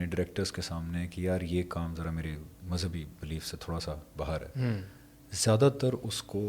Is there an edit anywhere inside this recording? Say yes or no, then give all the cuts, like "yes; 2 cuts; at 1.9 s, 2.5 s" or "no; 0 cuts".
no; 0 cuts